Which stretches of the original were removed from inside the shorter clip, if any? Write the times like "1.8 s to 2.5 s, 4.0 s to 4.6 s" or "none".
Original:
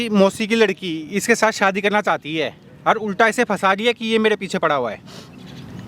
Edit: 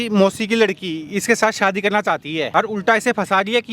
2.5 s to 2.8 s